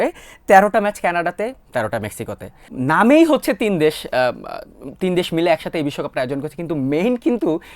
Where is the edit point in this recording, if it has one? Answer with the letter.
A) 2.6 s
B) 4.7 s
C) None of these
A